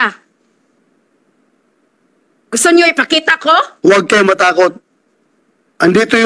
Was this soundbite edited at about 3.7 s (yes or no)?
yes